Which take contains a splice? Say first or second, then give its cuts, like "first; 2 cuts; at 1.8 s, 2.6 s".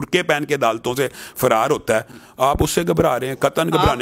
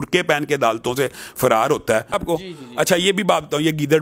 second; 1 cut; at 2.2 s